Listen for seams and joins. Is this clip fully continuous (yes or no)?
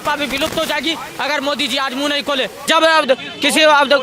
no